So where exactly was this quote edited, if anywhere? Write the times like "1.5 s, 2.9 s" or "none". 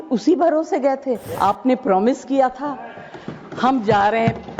1.3 s